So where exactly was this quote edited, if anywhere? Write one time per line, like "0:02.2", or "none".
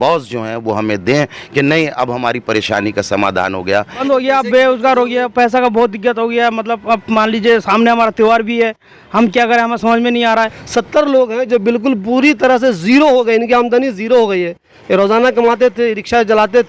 0:04.0
0:10.6